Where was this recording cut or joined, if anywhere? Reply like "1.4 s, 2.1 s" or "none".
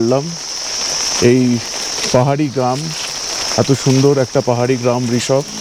none

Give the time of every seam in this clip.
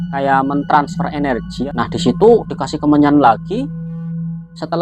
1.5 s

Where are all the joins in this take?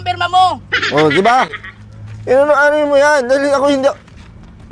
none

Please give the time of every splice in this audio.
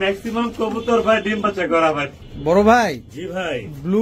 2.1 s

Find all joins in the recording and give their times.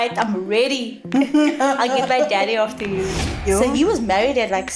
3.2 s

